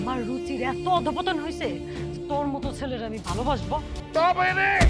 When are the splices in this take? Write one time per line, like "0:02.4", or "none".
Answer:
0:04.0